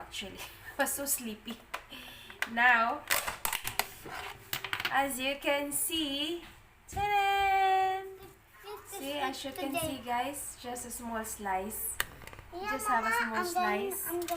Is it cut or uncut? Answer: cut